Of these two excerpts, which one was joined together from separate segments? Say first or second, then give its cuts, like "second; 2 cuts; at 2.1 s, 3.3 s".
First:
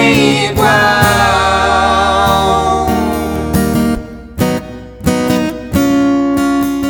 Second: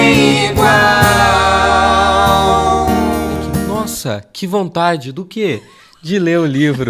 second; 1 cut; at 3.7 s